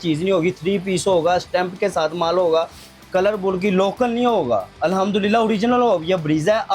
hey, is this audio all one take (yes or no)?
yes